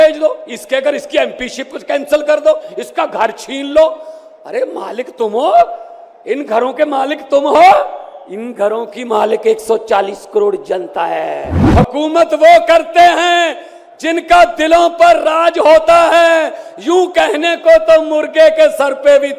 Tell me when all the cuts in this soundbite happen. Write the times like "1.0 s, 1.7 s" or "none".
11.6 s